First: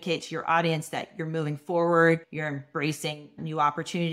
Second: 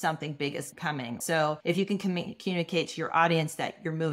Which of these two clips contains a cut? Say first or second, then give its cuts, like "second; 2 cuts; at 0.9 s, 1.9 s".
second; 1 cut; at 1.2 s